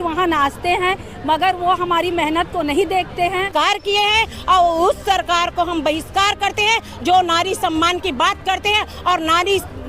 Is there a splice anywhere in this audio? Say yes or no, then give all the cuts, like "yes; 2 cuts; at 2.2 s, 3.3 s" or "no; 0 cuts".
yes; 1 cut; at 3.5 s